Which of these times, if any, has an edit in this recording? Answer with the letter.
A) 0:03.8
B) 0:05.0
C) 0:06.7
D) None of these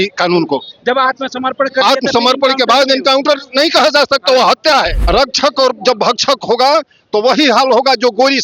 B